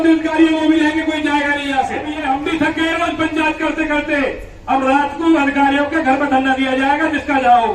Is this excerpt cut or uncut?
cut